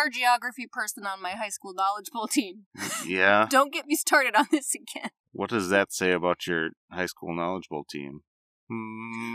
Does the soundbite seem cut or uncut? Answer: uncut